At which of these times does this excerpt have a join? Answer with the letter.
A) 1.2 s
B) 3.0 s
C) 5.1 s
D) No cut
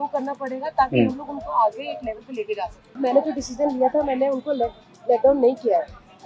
B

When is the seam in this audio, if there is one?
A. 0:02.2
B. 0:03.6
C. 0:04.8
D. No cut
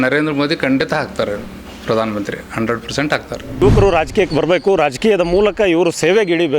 B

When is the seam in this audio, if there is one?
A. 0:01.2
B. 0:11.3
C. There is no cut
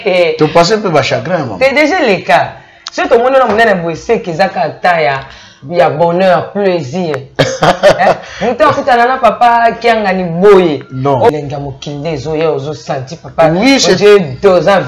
B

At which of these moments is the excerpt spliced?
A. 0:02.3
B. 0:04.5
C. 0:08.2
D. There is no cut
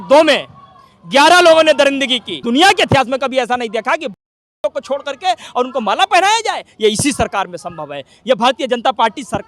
A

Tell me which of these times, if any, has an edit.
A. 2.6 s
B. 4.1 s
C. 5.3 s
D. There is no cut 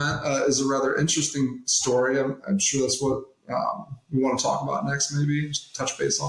D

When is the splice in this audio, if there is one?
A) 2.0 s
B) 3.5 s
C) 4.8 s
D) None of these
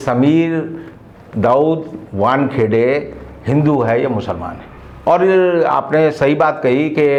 D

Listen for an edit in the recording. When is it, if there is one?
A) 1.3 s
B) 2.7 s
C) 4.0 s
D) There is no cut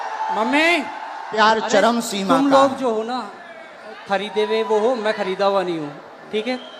A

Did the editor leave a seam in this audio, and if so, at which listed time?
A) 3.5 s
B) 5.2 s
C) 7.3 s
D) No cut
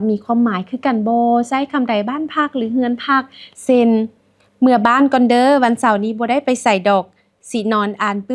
A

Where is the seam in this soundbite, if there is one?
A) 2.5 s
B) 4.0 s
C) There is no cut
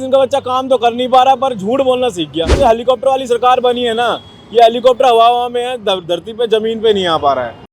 A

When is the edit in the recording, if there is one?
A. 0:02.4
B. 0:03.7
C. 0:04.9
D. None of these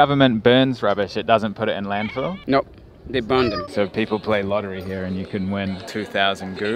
B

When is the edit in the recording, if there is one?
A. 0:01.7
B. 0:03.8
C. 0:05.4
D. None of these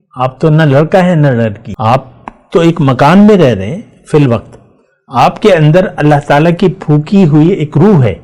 A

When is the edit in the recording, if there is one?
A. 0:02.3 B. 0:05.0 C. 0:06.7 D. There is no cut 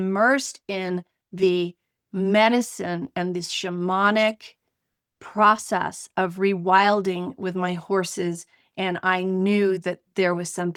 D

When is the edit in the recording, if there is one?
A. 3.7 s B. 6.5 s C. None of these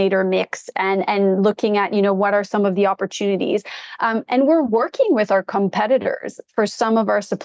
C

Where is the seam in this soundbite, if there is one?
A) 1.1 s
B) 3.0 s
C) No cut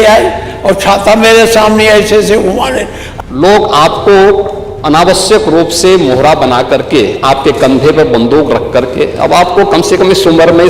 B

